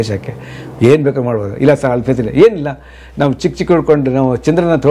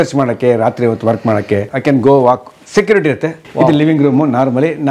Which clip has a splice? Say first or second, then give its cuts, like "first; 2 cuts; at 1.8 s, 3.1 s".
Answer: second; 2 cuts; at 1.7 s, 3.4 s